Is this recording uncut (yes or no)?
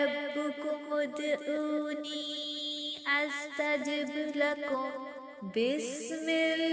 yes